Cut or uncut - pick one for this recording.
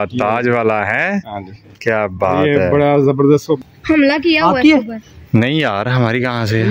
cut